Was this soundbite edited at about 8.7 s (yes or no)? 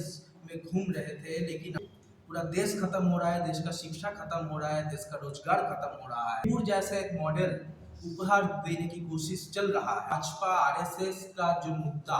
no